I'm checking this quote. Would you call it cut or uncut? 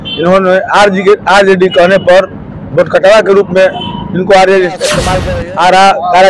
cut